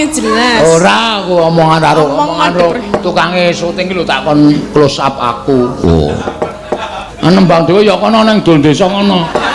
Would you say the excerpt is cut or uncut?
cut